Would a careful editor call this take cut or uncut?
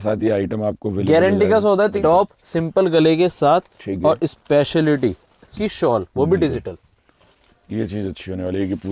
cut